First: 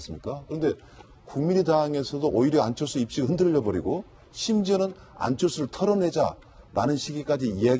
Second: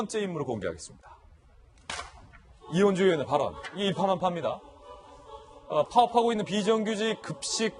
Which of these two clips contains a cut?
first; 1 cut; at 3.9 s

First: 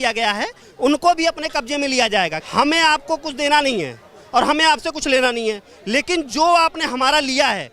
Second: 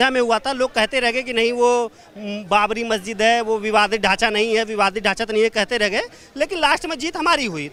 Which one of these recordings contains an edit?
first; 1 cut; at 2.4 s

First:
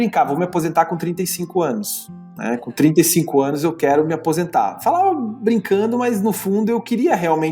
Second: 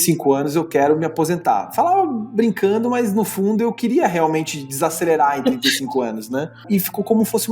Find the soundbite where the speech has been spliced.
second; 1 cut; at 6.6 s

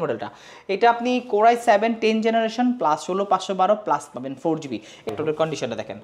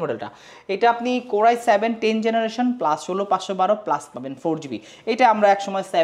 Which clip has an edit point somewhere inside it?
first; 1 cut; at 5.1 s

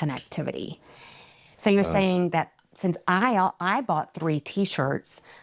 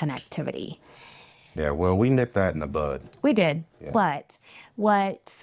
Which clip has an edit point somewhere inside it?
first; 1 cut; at 1.4 s

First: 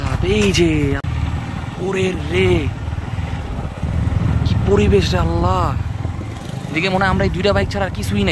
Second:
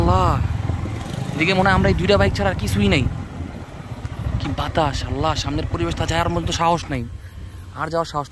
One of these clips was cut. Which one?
first; 1 cut; at 1.0 s

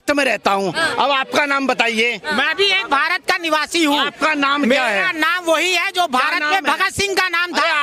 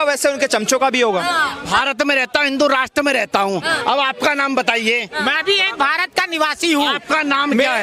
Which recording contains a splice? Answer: second; 1 cut; at 1.7 s

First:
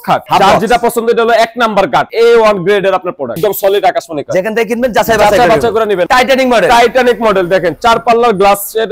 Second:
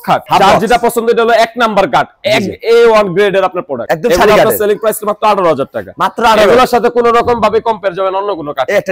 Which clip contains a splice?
first; 3 cuts; at 2.1 s, 3.3 s, 6.0 s

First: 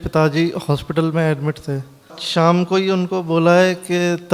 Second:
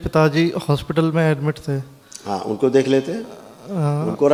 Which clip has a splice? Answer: first; 1 cut; at 2.2 s

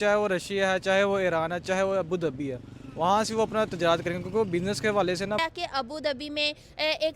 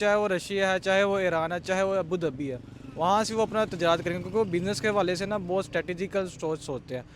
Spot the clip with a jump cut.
first; 1 cut; at 5.4 s

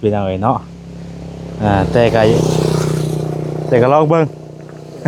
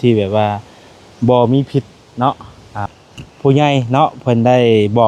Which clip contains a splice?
second; 1 cut; at 2.8 s

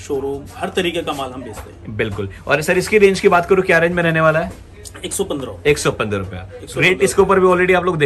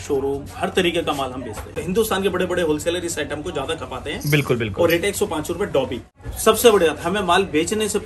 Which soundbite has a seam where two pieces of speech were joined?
second; 2 cuts; at 1.8 s, 6.1 s

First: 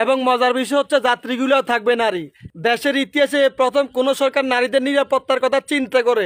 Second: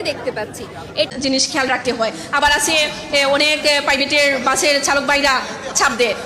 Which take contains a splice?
second; 1 cut; at 1.1 s

